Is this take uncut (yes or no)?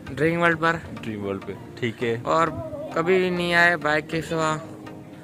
yes